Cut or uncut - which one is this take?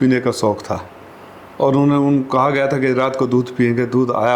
uncut